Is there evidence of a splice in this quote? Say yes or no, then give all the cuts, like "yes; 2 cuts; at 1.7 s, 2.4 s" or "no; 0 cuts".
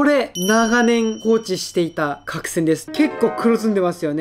yes; 1 cut; at 2.9 s